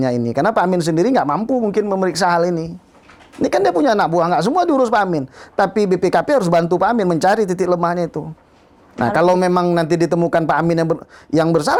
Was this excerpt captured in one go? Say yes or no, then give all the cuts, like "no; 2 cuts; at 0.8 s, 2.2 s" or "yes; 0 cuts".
yes; 0 cuts